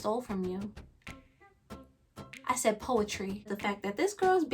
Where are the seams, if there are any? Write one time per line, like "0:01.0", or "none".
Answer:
0:03.5